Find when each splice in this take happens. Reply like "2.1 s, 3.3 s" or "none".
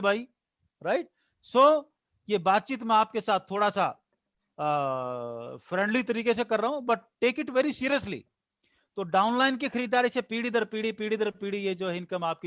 none